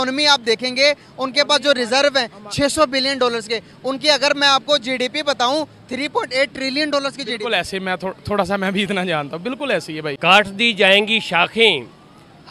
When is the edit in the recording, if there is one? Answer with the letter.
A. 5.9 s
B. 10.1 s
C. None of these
B